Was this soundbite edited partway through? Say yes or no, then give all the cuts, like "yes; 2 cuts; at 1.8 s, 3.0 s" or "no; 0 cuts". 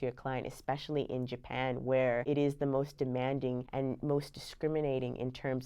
yes; 2 cuts; at 2.2 s, 3.7 s